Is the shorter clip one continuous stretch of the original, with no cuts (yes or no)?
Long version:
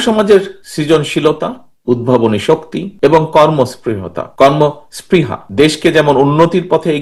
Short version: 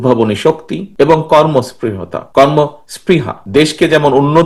yes